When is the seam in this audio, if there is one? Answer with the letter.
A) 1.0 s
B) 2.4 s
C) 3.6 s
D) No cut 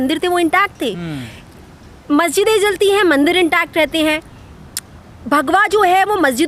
D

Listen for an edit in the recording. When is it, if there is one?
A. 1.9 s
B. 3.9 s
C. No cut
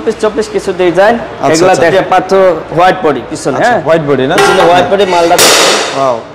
A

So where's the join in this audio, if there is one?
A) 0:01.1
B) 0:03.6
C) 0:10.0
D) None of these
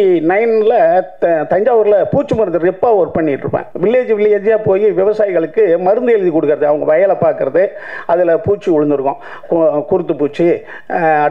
B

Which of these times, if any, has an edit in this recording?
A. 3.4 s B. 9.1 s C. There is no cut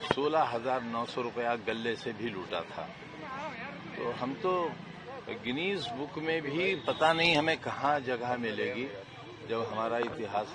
C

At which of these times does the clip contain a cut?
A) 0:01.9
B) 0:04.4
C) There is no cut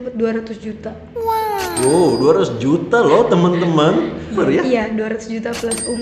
B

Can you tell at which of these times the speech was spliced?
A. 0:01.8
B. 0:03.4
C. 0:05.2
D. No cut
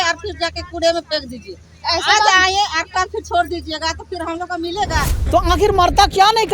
C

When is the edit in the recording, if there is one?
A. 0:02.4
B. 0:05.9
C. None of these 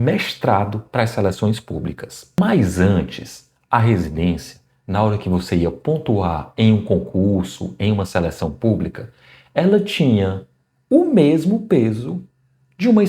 A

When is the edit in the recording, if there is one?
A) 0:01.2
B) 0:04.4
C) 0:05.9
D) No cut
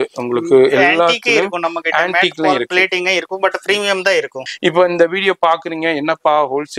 B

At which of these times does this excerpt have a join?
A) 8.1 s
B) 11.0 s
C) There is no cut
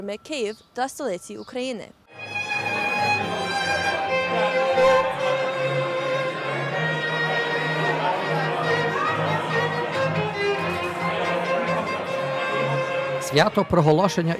C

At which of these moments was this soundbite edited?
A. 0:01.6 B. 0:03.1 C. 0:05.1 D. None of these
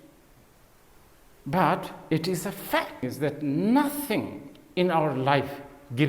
B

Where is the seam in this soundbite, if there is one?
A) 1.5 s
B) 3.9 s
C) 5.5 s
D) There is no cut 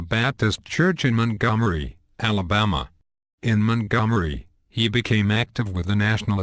D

